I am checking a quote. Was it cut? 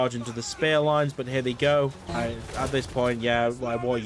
yes; 1 cut; at 2.0 s

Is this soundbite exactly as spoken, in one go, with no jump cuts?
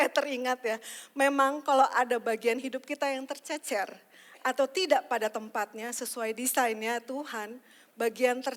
yes; 0 cuts

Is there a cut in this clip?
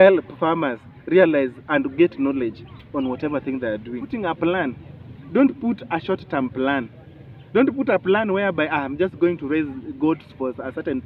yes; 1 cut; at 4.1 s

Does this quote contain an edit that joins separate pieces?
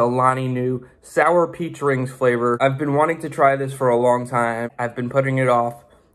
yes; 2 cuts; at 2.6 s, 4.7 s

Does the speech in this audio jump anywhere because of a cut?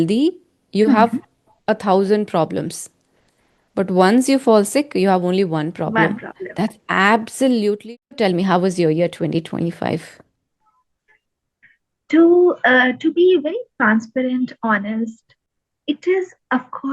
yes; 1 cut; at 7.8 s

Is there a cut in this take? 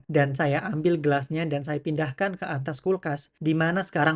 no; 0 cuts

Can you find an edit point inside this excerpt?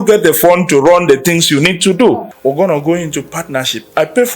yes; 1 cut; at 2.3 s

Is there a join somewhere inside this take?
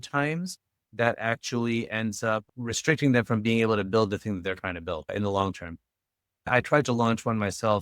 yes; 1 cut; at 6.5 s

